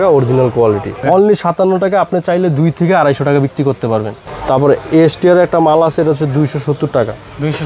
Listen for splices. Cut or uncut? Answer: cut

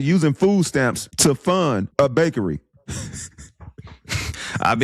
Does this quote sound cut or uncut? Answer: cut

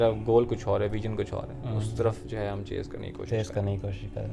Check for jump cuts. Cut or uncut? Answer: uncut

